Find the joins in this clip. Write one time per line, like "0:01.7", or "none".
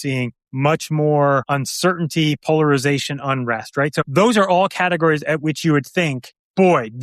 none